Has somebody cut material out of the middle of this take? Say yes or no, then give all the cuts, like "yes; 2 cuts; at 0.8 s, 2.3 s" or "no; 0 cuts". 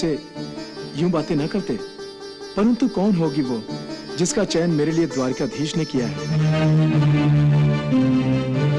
yes; 1 cut; at 6.2 s